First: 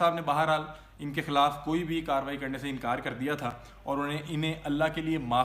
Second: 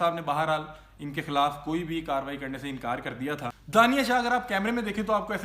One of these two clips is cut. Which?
second; 1 cut; at 3.5 s

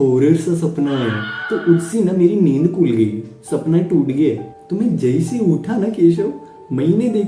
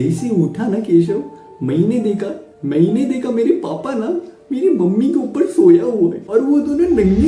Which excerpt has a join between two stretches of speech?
second; 1 cut; at 6.2 s

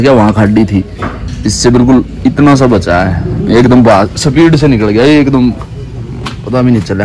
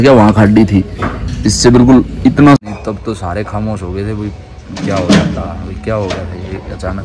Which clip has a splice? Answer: second; 1 cut; at 2.6 s

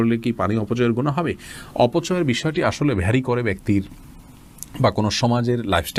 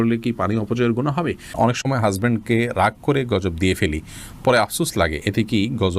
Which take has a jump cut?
second; 1 cut; at 1.5 s

